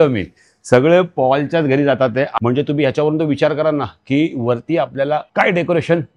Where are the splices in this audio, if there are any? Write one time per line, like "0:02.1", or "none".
none

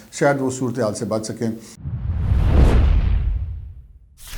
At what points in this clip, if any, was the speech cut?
0:01.7

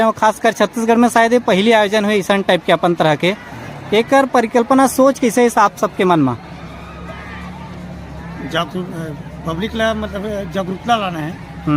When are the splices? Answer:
none

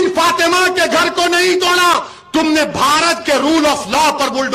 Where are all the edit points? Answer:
none

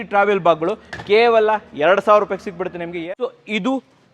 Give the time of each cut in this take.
0:03.0

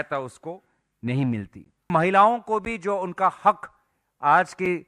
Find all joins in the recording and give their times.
0:01.9

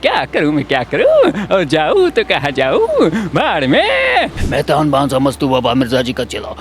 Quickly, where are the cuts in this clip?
0:04.4

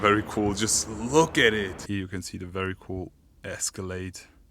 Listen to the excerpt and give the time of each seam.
0:01.9

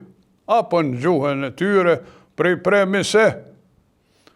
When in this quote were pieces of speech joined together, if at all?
none

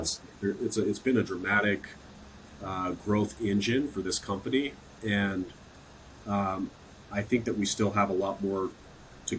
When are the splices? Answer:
none

